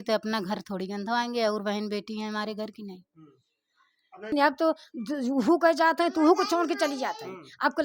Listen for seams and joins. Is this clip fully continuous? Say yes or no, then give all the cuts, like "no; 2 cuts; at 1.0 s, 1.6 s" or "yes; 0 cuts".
no; 1 cut; at 4.3 s